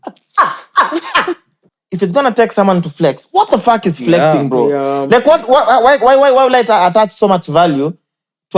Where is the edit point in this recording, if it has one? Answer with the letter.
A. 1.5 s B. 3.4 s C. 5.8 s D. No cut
A